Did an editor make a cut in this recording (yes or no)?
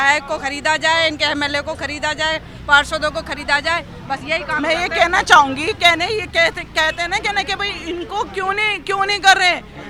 no